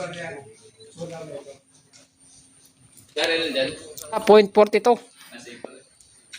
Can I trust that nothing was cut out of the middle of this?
no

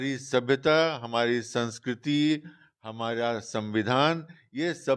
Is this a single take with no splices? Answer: yes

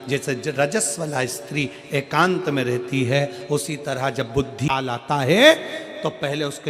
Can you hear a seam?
yes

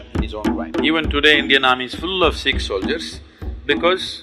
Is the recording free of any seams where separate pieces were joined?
yes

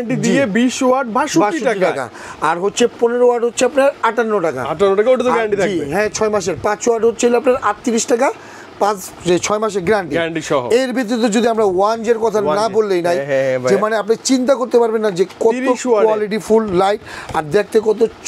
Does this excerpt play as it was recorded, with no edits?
yes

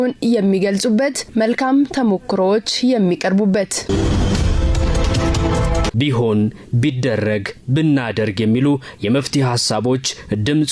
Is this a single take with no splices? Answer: no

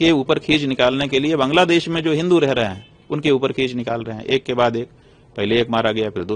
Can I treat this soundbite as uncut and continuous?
yes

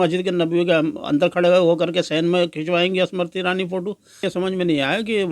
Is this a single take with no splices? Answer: no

